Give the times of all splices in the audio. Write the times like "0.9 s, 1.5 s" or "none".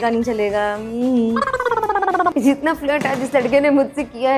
2.3 s

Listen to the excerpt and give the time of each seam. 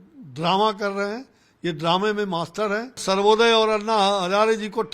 3.0 s

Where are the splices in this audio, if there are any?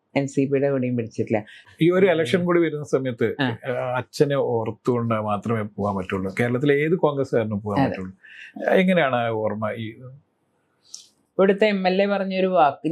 1.6 s, 11.1 s

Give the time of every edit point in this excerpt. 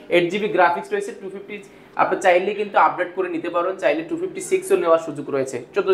none

